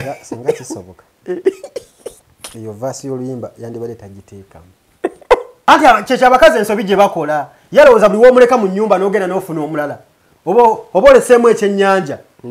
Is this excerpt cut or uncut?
cut